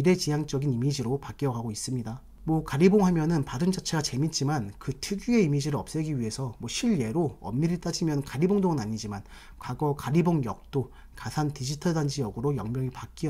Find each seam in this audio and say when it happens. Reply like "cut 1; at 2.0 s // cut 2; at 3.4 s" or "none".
none